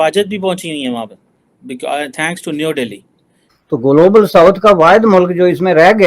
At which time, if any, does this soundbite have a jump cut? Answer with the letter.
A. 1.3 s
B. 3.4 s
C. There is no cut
B